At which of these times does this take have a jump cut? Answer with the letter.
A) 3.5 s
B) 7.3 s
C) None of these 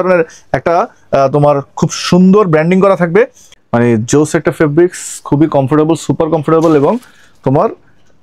A